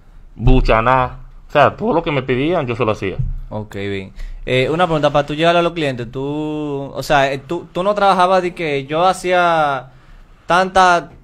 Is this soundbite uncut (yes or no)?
yes